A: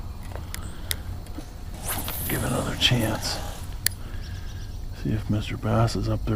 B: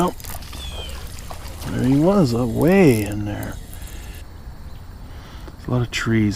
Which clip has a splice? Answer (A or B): B